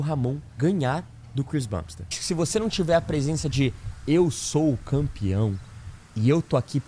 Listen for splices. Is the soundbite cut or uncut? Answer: cut